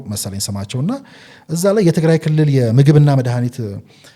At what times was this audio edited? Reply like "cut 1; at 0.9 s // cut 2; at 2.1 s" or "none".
cut 1; at 1.3 s